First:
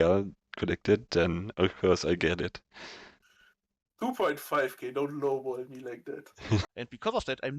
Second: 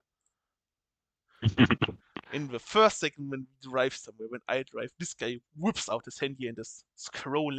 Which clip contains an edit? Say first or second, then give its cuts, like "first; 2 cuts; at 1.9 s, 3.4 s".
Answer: first; 1 cut; at 6.6 s